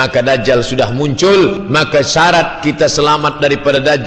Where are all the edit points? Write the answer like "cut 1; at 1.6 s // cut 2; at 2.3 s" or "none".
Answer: cut 1; at 1.6 s